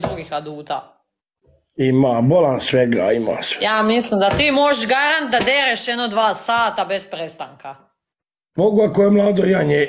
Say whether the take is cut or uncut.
uncut